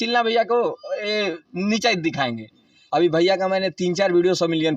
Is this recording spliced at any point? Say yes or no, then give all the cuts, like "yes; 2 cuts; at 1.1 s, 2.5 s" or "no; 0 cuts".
yes; 1 cut; at 2.7 s